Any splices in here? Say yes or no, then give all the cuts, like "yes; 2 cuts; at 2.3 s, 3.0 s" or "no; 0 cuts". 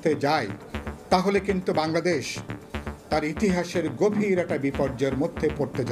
no; 0 cuts